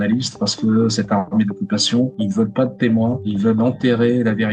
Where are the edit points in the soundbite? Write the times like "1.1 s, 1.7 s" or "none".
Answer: none